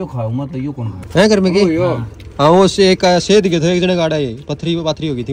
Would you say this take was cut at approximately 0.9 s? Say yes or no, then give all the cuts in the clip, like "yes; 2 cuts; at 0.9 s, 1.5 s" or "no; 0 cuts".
yes; 1 cut; at 0.9 s